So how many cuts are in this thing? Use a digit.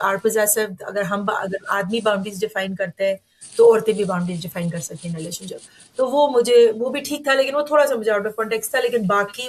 0